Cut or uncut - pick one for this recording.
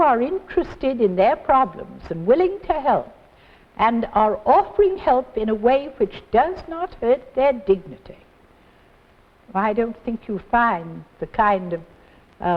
uncut